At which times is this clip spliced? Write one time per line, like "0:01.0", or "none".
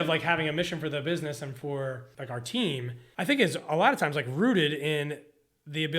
0:02.1
0:03.0